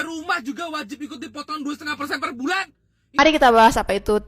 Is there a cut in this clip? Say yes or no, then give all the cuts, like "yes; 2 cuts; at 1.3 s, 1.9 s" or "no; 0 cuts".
yes; 1 cut; at 3.2 s